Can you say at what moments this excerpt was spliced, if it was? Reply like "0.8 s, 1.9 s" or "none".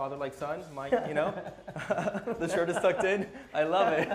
none